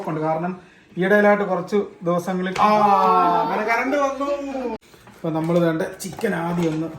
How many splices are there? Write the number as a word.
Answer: one